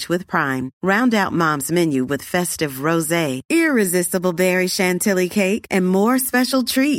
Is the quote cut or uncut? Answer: uncut